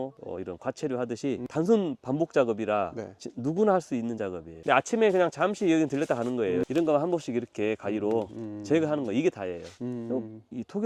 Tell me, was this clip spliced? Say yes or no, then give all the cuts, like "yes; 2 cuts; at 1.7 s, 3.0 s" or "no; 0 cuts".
no; 0 cuts